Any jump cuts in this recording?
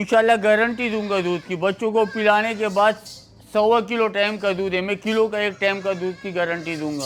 no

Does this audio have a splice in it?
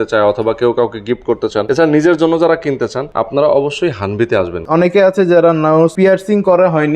yes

